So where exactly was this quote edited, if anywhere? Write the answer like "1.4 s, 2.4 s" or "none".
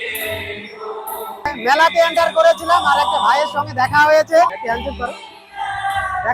1.6 s, 4.5 s